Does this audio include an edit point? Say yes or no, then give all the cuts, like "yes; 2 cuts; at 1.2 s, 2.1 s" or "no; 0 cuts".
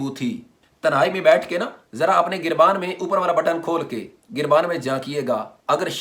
no; 0 cuts